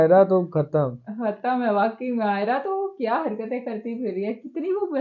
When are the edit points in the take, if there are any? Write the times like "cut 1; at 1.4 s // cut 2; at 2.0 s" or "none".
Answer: none